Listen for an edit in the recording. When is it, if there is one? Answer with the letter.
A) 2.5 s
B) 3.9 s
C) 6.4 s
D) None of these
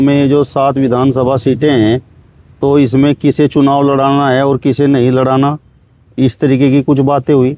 D